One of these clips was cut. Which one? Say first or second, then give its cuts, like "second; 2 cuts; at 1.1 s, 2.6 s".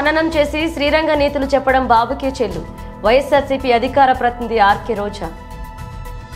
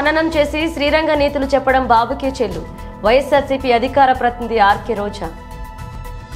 second; 1 cut; at 5.3 s